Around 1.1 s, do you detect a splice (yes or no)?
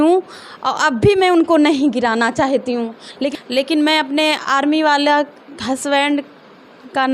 no